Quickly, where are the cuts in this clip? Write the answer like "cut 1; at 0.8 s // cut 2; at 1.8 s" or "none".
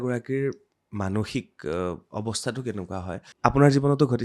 cut 1; at 3.2 s